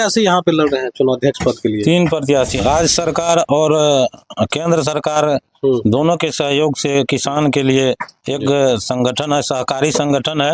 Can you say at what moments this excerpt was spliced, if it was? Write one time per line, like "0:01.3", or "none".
0:02.6